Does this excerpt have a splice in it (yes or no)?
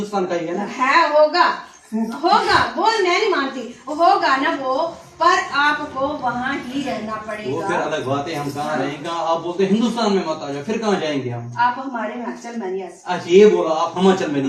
no